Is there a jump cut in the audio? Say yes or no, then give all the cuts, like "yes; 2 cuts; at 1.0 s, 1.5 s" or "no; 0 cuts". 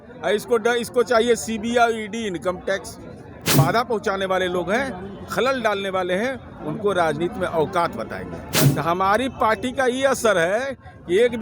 yes; 2 cuts; at 3.5 s, 8.6 s